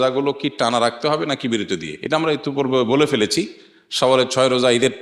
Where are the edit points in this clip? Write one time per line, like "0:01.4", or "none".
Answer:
none